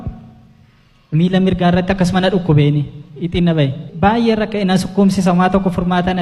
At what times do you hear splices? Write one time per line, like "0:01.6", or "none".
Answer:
none